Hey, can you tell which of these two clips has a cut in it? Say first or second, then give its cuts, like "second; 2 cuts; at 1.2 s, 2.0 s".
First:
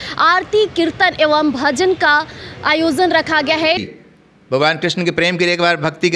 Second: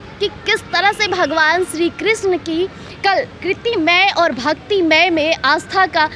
first; 1 cut; at 3.8 s